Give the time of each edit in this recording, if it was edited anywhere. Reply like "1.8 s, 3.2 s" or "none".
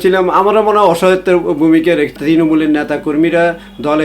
2.2 s